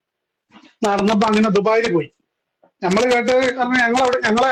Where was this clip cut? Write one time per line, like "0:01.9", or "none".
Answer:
none